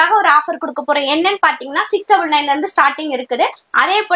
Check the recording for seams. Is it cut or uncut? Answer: uncut